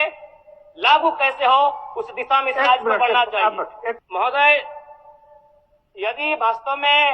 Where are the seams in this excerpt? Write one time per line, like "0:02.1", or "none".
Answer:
0:04.0